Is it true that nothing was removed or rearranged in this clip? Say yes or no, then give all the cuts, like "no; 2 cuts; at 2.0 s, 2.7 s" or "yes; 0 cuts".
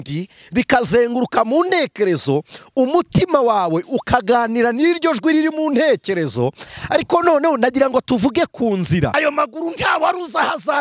no; 1 cut; at 9.1 s